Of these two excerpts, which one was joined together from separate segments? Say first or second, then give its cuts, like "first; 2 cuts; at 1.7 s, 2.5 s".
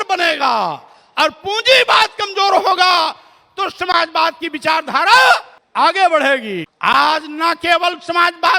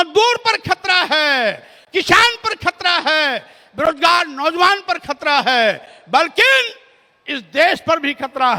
first; 2 cuts; at 5.6 s, 6.6 s